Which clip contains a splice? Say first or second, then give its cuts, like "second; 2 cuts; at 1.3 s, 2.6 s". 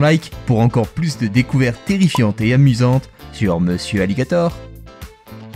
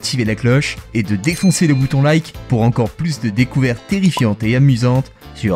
first; 1 cut; at 4.5 s